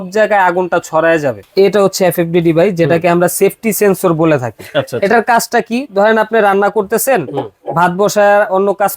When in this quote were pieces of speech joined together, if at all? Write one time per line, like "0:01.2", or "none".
0:01.4

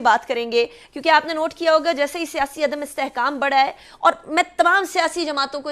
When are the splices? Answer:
none

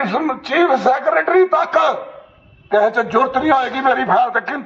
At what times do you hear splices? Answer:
none

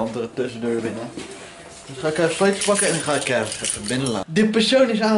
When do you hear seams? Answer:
0:04.3

